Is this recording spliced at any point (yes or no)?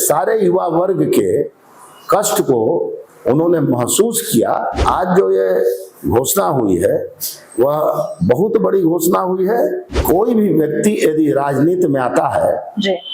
yes